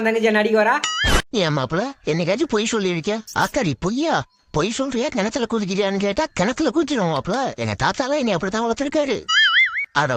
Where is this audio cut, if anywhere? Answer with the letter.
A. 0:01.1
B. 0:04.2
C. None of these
A